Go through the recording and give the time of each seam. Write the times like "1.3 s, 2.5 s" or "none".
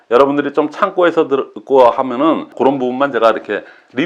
2.5 s